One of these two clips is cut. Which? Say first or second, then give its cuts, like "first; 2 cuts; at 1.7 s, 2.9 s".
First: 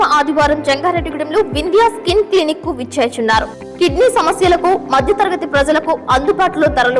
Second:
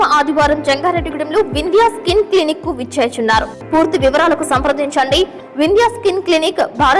second; 1 cut; at 3.6 s